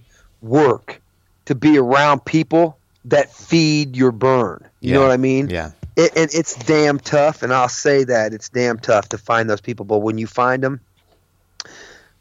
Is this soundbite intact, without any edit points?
yes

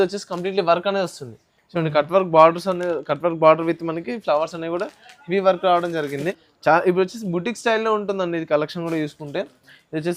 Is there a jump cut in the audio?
yes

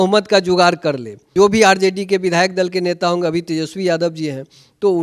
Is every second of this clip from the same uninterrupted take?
no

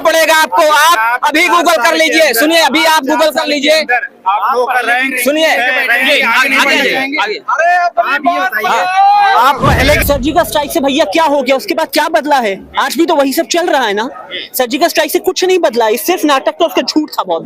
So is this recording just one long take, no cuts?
no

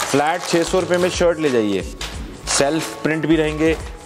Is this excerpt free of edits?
yes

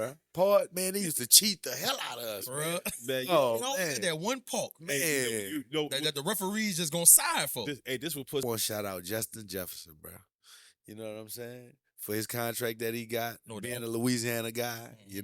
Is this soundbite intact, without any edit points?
no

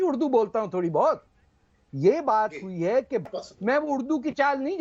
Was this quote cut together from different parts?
yes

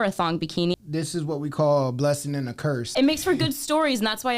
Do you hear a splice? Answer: yes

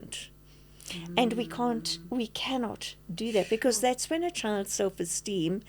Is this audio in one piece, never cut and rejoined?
yes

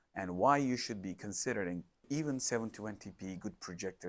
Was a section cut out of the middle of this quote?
yes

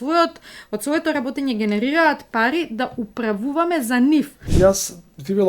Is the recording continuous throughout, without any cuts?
no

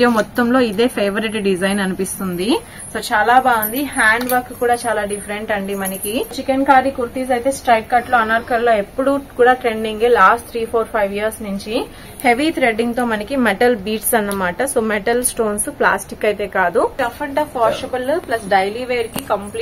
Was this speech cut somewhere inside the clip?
yes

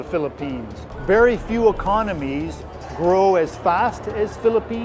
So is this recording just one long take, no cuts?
no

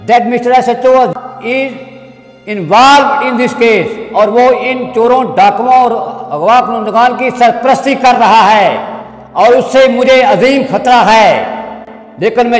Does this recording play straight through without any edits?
no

